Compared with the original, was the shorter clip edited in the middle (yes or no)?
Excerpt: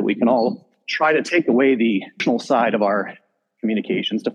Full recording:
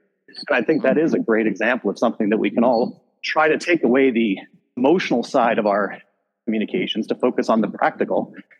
yes